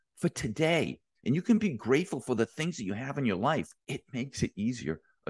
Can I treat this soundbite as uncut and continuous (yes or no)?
no